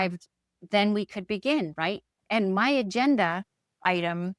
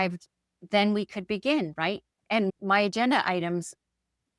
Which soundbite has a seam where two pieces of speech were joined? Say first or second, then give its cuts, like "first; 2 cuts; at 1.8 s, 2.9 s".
second; 1 cut; at 2.5 s